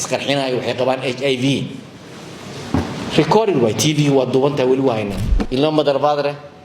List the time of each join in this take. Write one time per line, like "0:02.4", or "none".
0:05.4